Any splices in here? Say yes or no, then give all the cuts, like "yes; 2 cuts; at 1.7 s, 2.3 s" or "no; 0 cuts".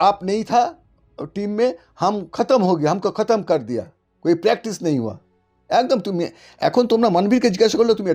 no; 0 cuts